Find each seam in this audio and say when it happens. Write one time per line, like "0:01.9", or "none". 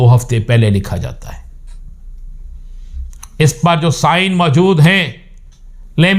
none